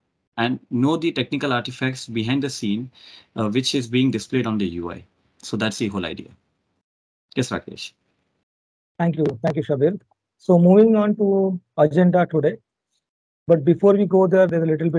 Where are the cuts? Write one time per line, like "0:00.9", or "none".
none